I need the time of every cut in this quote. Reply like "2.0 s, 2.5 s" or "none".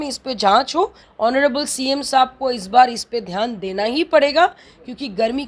1.0 s